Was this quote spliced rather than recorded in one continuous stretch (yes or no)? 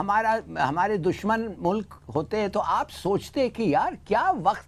no